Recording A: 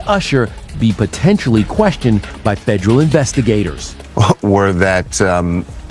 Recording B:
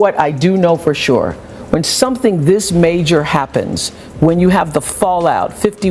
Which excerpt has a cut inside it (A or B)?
A